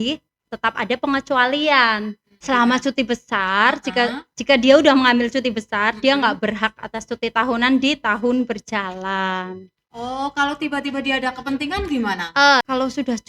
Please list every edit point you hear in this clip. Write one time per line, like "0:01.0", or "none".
0:02.3
0:12.6